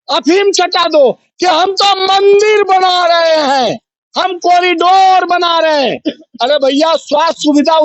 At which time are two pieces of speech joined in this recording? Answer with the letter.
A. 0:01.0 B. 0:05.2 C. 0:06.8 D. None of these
D